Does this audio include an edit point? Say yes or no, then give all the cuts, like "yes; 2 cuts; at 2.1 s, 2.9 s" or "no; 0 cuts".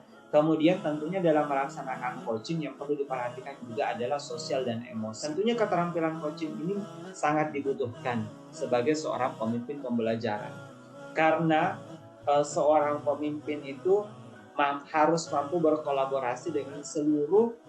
yes; 1 cut; at 5.3 s